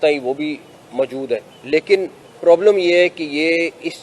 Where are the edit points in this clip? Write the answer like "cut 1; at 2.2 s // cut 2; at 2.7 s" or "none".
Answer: cut 1; at 1.0 s // cut 2; at 2.2 s